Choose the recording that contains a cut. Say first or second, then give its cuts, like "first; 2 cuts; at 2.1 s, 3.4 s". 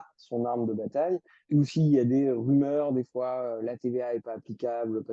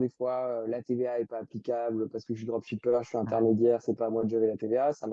first; 1 cut; at 1.3 s